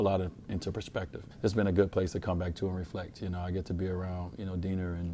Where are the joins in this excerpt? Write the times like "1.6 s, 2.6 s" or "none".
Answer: 1.2 s